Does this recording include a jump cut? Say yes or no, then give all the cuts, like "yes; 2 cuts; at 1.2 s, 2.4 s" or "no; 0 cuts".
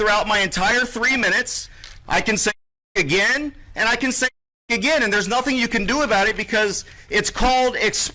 no; 0 cuts